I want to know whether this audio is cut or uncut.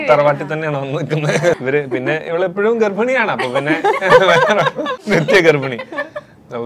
cut